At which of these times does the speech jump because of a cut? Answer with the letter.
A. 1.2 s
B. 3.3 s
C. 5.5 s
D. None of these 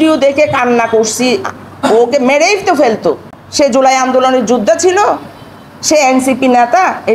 B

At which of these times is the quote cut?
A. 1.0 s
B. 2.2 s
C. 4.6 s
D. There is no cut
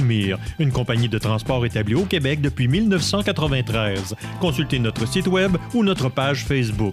D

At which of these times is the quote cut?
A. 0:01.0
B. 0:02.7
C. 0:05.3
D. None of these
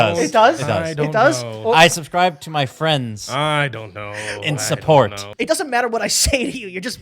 C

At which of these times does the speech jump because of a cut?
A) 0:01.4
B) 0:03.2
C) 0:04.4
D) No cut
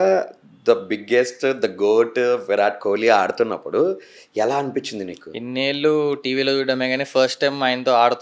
D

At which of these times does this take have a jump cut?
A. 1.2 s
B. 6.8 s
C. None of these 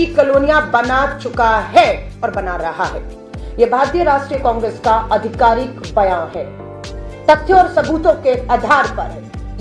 C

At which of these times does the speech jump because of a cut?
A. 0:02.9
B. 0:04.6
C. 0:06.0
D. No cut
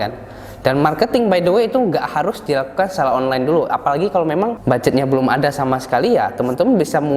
B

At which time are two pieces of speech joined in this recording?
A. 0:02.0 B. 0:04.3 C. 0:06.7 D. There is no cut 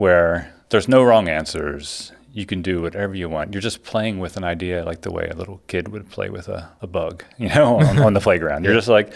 C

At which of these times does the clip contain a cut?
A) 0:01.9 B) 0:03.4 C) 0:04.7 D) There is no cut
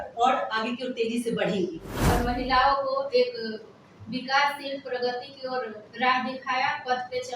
A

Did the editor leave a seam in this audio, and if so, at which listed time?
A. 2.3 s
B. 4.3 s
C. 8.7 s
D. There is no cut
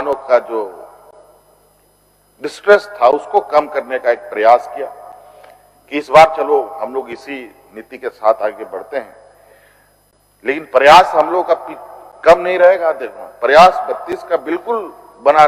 D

